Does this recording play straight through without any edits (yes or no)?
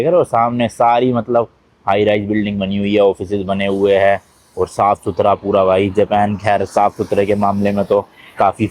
yes